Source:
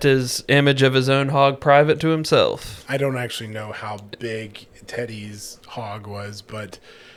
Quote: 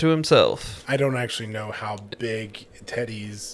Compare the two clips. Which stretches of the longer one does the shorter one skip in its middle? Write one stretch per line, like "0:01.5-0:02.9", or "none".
none